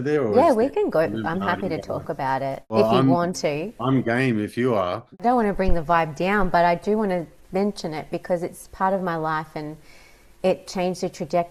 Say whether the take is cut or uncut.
cut